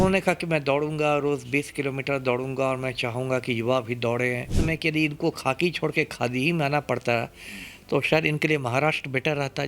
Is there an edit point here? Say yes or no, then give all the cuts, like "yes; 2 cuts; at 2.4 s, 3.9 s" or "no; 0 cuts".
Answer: yes; 1 cut; at 4.5 s